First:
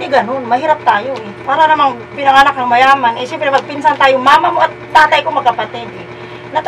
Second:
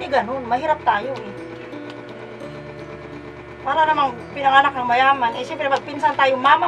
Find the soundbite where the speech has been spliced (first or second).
first